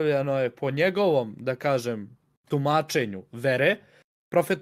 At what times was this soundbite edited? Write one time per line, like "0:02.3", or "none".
0:01.3